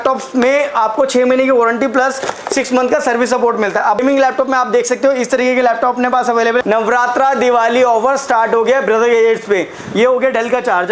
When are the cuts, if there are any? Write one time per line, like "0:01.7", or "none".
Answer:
0:04.0
0:06.6
0:09.8